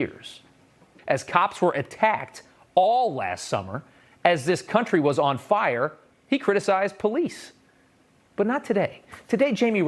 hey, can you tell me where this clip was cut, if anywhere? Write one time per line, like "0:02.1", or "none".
0:00.9